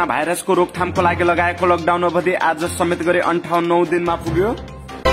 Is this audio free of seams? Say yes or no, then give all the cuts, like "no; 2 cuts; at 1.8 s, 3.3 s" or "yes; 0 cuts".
yes; 0 cuts